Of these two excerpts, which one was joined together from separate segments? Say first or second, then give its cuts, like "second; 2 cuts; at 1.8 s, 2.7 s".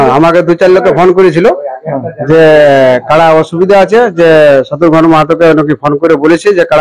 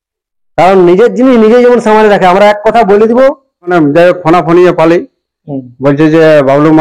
second; 1 cut; at 3.7 s